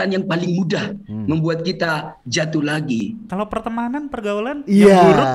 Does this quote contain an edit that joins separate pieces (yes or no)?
yes